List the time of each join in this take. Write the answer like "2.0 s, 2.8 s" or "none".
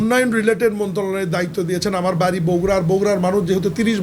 none

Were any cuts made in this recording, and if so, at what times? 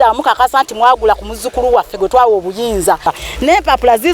3.0 s

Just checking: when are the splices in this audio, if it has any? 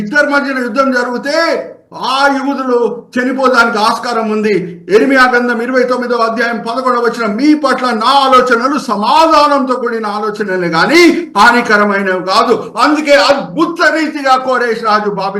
none

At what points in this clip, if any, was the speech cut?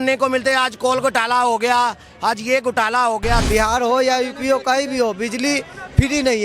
3.5 s

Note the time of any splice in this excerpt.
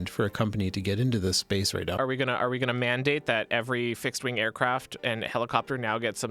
1.9 s

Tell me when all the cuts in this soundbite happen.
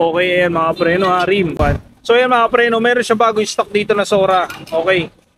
1.6 s

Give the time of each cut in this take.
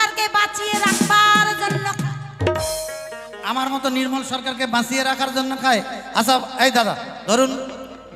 7.1 s

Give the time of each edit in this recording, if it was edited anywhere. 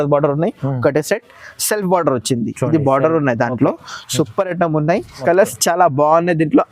5.1 s

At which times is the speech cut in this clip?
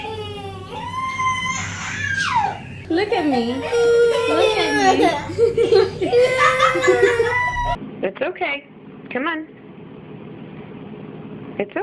2.7 s, 7.8 s

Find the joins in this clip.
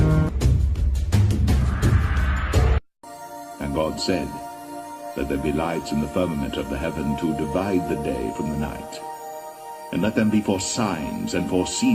1.4 s

